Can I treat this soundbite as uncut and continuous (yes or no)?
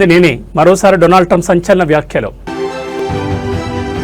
yes